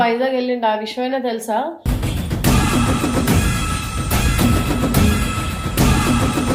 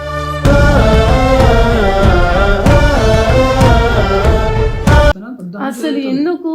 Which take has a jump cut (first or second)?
second